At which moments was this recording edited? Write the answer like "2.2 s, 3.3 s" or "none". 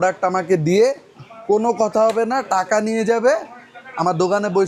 none